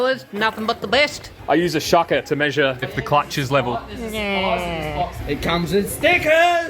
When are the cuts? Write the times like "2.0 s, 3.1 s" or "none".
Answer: 1.3 s, 2.9 s, 5.1 s